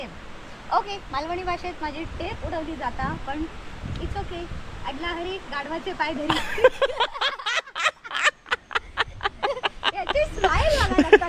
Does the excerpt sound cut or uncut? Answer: uncut